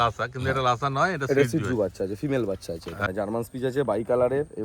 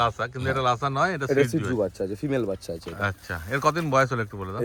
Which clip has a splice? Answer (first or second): first